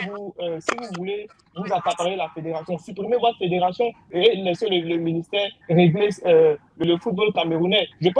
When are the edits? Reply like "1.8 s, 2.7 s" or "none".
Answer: 4.1 s, 6.8 s